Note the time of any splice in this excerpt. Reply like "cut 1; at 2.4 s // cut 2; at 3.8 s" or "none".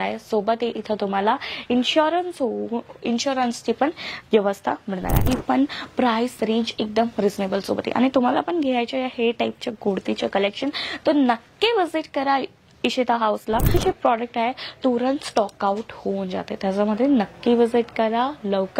cut 1; at 5.3 s // cut 2; at 13.7 s